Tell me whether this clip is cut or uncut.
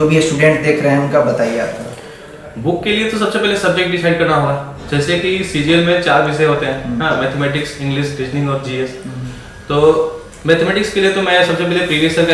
uncut